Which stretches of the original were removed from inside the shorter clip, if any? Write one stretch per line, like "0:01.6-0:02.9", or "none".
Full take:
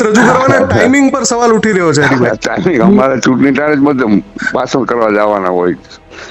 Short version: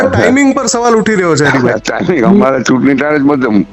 none